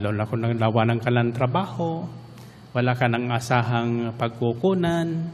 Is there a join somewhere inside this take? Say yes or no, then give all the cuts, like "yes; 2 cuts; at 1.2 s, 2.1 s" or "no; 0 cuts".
no; 0 cuts